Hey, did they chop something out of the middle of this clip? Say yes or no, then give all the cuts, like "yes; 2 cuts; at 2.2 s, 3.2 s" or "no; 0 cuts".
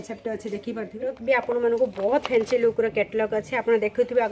yes; 1 cut; at 1.0 s